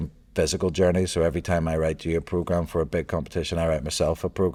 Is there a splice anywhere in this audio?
no; 0 cuts

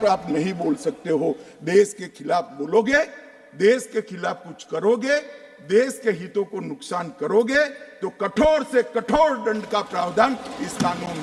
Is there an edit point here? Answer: no; 0 cuts

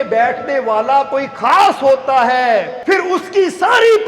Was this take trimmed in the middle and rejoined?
yes; 1 cut; at 2.7 s

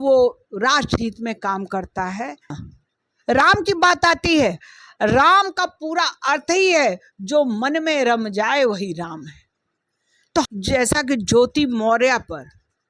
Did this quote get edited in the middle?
yes; 2 cuts; at 2.7 s, 10.5 s

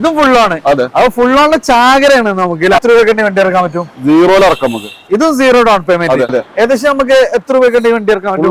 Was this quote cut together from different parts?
yes; 2 cuts; at 2.8 s, 6.4 s

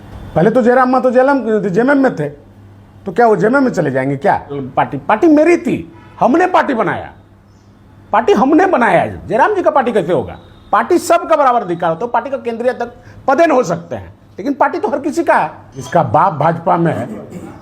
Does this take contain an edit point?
yes; 2 cuts; at 4.6 s, 15.8 s

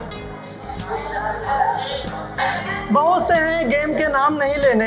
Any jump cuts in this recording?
yes; 1 cut; at 2.4 s

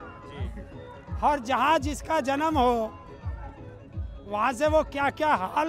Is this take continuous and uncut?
yes; 0 cuts

